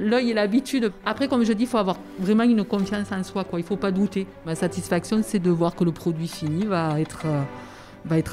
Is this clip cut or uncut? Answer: cut